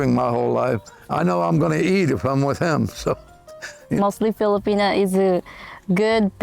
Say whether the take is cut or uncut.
uncut